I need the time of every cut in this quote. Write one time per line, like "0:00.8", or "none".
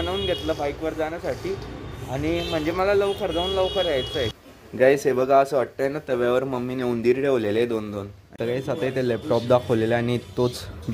0:04.4
0:08.3